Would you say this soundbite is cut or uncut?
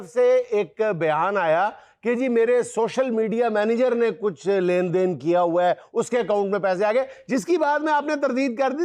uncut